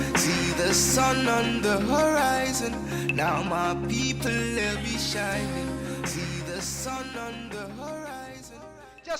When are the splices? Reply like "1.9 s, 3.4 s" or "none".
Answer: 4.5 s